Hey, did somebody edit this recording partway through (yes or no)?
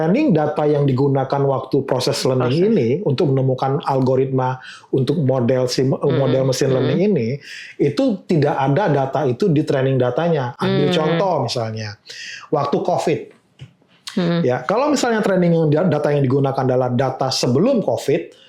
no